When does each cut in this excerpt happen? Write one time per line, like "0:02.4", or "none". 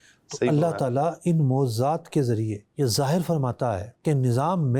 none

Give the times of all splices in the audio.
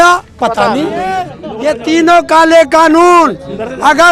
0:01.4

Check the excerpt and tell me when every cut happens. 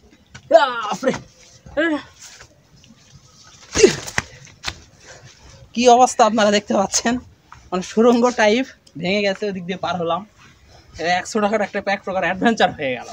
none

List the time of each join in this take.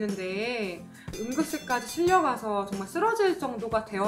0:01.0

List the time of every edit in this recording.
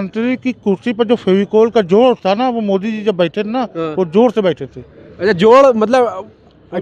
none

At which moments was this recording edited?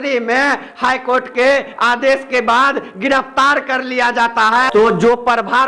0:04.7

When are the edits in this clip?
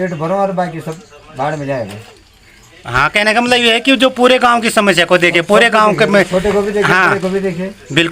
none

